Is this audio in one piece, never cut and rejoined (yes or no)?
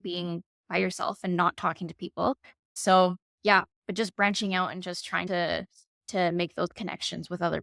yes